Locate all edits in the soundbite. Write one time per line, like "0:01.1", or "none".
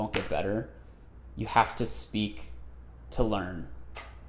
none